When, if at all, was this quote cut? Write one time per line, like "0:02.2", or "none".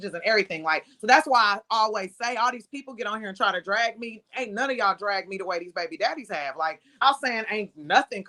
0:07.0